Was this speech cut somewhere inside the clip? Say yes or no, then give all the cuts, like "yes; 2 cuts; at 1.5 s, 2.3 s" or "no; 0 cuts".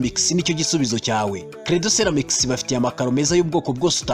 no; 0 cuts